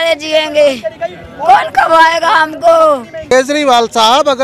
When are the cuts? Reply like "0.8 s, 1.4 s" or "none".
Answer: 3.3 s

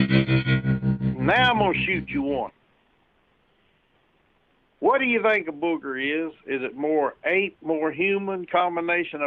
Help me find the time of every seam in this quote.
1.0 s

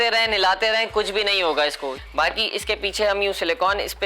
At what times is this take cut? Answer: 1.9 s

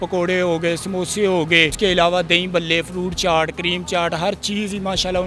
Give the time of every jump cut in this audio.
none

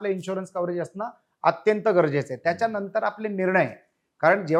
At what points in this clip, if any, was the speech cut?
none

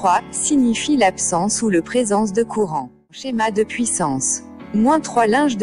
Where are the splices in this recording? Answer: 3.2 s

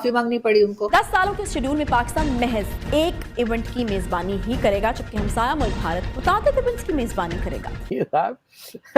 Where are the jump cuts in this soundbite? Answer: 0.8 s, 7.8 s

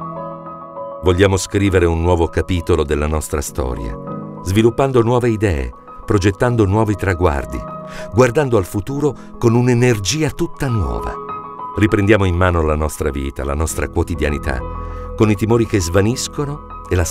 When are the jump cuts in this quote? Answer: 1.0 s

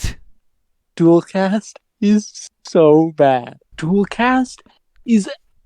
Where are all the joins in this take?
3.7 s

